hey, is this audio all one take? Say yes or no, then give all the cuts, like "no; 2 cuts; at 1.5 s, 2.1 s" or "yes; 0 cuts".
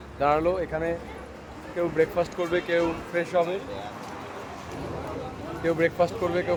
yes; 0 cuts